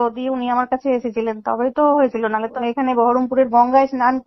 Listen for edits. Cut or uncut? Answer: cut